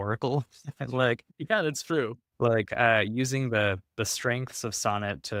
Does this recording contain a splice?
no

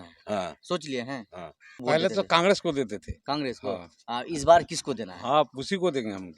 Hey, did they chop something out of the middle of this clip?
yes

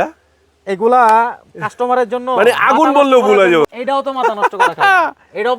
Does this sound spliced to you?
yes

